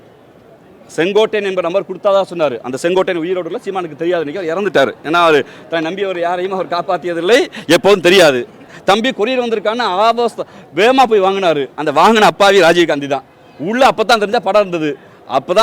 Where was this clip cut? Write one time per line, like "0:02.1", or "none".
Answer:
0:08.7